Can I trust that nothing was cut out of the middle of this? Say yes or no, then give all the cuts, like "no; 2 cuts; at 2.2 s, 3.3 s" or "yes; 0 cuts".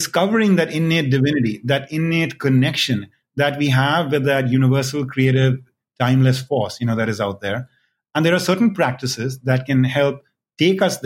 yes; 0 cuts